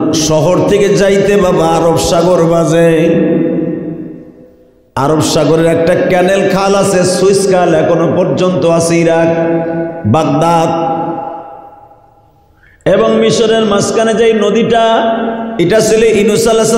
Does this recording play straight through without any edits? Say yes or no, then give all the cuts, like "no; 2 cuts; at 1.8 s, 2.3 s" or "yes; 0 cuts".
yes; 0 cuts